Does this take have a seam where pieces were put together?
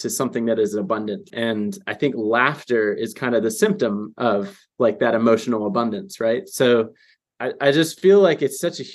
yes; 1 cut; at 1.3 s

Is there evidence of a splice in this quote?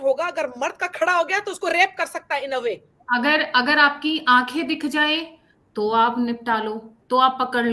yes; 1 cut; at 2.9 s

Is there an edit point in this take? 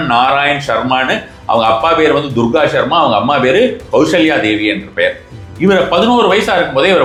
no; 0 cuts

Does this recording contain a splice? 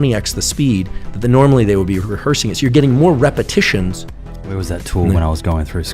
yes; 1 cut; at 4.1 s

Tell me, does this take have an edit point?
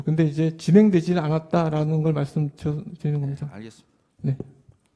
no; 0 cuts

